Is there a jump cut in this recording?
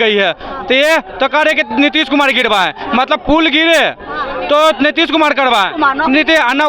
no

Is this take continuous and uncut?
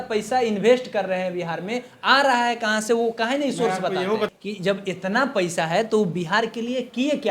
no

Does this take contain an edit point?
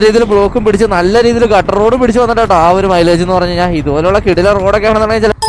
no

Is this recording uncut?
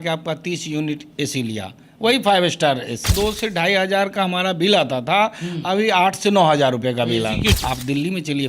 no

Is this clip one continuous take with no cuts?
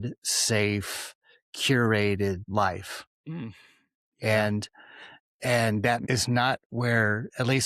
no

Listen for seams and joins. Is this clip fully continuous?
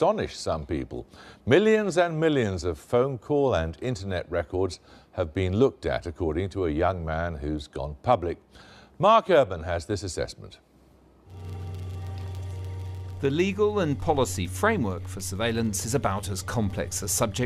no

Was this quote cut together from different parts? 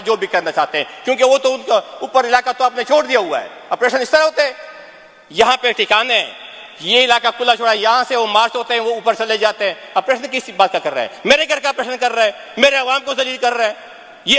no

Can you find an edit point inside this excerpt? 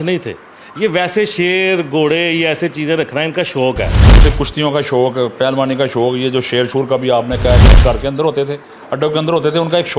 yes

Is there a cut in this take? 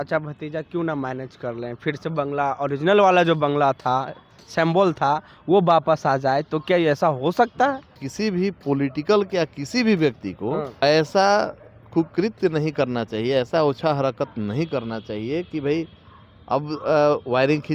yes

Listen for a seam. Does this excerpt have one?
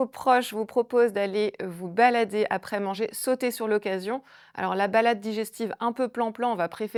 no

